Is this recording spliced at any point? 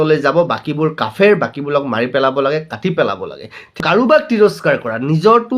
yes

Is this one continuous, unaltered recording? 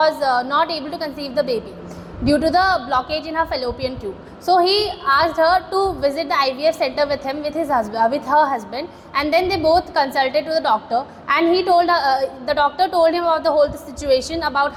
yes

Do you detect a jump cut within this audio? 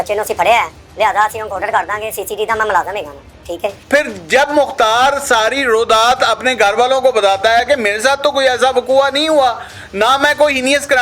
yes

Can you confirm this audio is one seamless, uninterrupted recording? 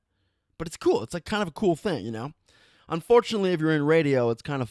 yes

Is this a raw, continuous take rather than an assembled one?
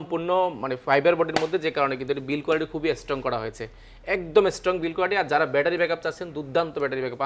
yes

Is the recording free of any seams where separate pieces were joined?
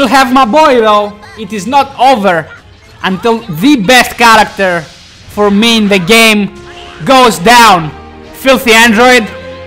yes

